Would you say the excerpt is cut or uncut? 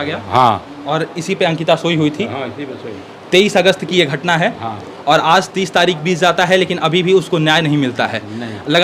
uncut